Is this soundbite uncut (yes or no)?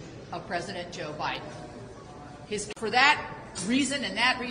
yes